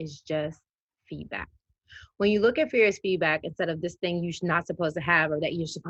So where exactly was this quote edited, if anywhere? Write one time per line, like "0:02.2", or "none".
none